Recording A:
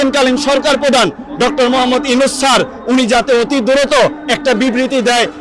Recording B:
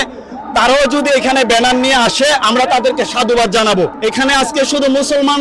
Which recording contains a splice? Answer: B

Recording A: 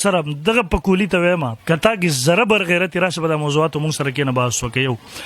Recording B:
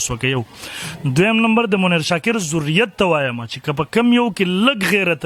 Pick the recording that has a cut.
A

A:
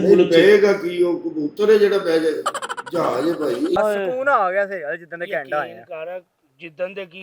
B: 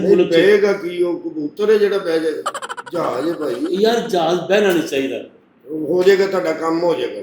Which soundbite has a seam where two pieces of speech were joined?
A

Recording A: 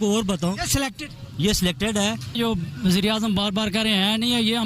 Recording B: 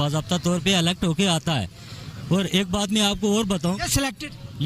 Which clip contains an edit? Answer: A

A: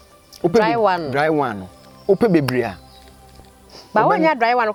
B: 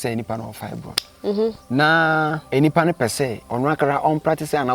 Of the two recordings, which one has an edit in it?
B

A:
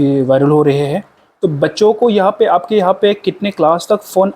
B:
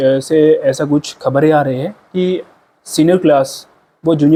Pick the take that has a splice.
A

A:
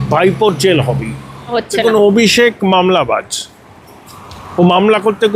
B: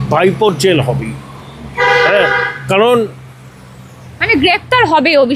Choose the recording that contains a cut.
A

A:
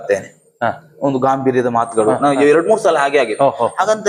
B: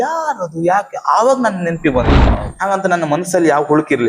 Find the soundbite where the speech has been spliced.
B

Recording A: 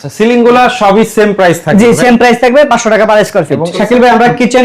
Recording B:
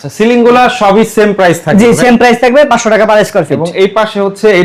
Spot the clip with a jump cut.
A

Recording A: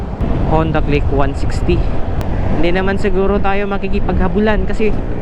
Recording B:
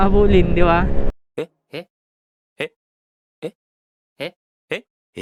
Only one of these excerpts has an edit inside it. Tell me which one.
A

